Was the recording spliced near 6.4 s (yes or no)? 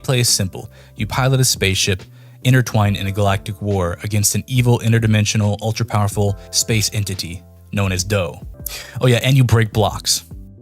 no